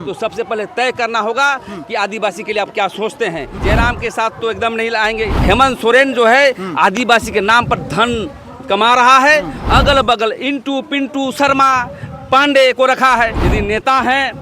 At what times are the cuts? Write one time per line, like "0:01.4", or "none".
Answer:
0:03.6
0:05.3
0:09.6
0:13.4